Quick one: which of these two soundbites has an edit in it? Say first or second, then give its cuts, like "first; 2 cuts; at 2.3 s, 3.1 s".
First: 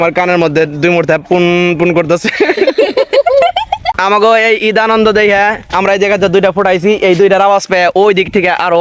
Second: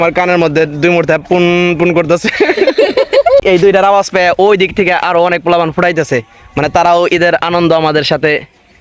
second; 1 cut; at 3.4 s